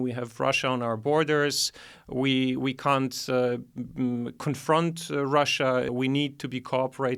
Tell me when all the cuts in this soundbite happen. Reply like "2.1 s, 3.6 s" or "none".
5.9 s